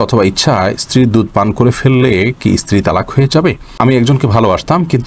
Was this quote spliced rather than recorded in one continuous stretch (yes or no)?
yes